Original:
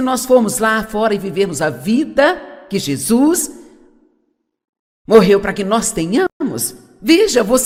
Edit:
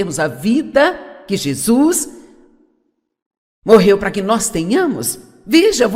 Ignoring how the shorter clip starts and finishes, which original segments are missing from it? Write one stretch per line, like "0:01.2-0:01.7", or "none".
0:06.3-0:06.4